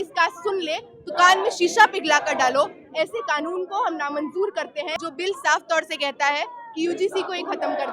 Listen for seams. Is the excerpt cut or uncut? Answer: cut